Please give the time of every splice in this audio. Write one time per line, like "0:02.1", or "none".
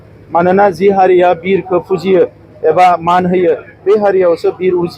none